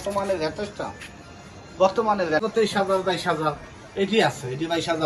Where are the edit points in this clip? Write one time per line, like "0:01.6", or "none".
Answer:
0:02.4